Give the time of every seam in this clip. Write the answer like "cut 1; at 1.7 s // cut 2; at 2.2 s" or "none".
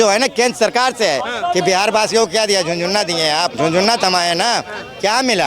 cut 1; at 3.5 s